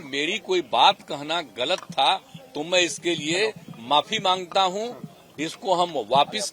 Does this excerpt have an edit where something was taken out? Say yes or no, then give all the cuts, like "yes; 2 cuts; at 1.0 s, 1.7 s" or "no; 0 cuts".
no; 0 cuts